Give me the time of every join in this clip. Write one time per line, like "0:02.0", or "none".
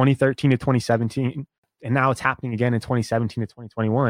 0:01.7